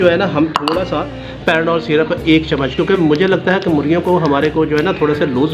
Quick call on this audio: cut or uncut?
uncut